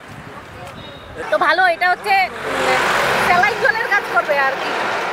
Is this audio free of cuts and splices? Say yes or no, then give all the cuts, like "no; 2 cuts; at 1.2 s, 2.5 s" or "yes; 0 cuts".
no; 1 cut; at 1.2 s